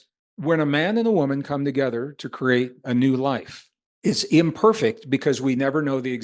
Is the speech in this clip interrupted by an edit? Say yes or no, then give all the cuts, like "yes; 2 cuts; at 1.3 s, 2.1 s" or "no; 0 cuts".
no; 0 cuts